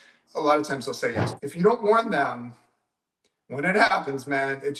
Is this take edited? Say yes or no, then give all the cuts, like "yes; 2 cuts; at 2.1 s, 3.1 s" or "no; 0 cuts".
yes; 1 cut; at 1.3 s